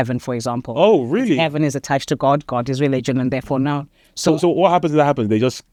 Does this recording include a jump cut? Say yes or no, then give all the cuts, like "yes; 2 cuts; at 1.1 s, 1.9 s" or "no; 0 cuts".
no; 0 cuts